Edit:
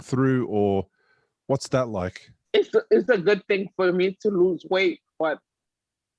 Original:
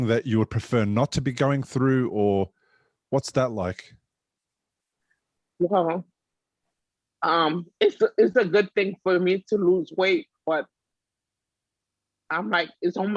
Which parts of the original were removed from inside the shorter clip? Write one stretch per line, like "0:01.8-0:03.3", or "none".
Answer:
0:04.0-0:07.7